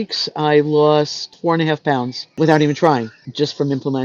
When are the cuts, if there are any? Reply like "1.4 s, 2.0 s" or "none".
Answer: 1.3 s